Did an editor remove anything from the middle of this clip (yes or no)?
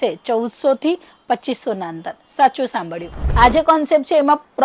yes